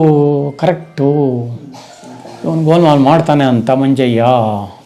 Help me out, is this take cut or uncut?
uncut